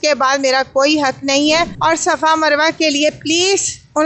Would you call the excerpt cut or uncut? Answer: cut